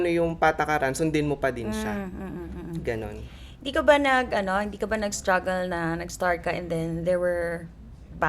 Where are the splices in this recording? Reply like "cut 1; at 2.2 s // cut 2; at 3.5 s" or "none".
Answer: none